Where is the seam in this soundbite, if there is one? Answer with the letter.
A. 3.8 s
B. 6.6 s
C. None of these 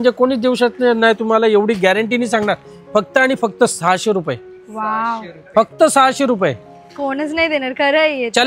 C